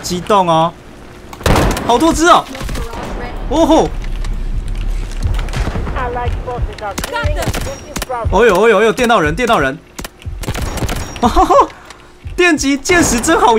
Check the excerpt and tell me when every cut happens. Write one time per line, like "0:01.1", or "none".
none